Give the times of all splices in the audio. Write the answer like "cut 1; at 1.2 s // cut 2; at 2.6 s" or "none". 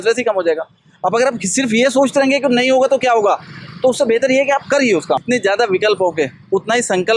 cut 1; at 5.2 s